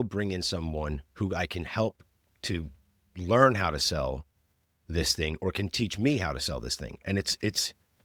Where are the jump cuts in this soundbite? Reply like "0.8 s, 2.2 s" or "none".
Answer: none

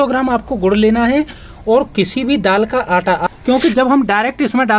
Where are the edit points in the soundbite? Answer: 3.3 s

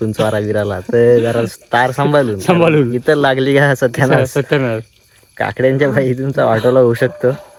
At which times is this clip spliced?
none

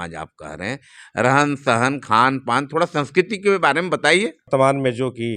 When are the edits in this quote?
4.5 s

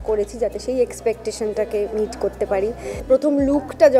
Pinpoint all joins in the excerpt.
2.9 s

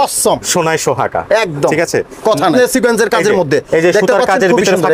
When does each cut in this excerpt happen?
2.5 s

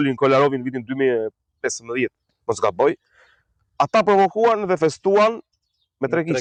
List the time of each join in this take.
none

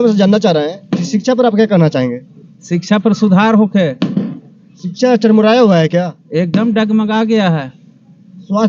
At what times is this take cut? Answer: none

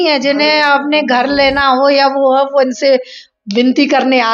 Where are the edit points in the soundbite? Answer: none

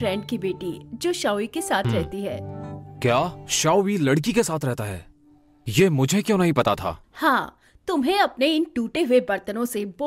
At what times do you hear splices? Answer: 3.4 s

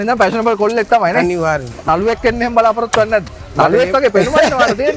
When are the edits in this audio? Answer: 1.8 s, 3.4 s

